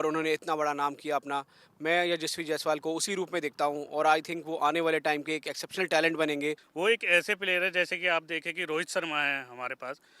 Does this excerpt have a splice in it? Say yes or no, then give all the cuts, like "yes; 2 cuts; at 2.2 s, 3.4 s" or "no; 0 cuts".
yes; 1 cut; at 6.7 s